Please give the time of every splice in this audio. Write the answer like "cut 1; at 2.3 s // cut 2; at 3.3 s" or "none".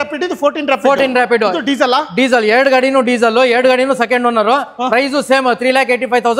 none